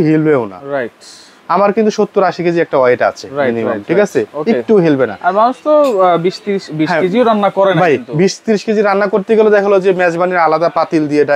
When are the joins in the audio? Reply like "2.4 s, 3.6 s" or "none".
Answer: none